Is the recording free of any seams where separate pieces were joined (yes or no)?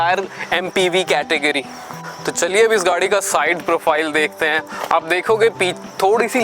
yes